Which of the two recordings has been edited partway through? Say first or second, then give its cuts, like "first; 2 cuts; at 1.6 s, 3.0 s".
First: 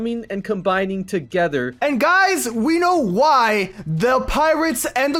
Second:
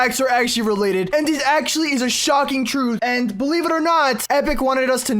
second; 3 cuts; at 1.1 s, 3.0 s, 4.2 s